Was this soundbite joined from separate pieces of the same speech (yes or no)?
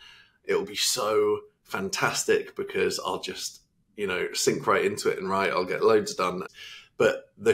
yes